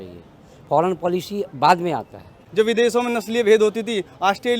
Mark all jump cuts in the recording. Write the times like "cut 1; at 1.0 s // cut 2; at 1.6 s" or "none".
cut 1; at 2.3 s